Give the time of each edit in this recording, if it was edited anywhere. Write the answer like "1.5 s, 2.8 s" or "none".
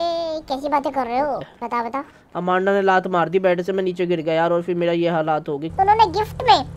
1.5 s, 5.6 s